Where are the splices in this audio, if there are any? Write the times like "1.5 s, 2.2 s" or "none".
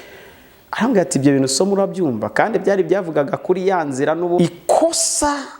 4.4 s